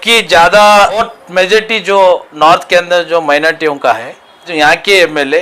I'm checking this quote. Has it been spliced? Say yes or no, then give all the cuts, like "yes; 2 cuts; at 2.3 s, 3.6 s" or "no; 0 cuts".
yes; 2 cuts; at 1.0 s, 4.5 s